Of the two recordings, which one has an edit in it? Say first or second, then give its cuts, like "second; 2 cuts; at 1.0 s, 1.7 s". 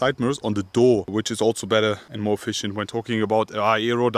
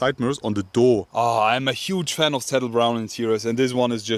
second; 1 cut; at 1.1 s